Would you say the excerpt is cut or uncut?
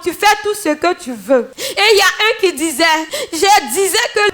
cut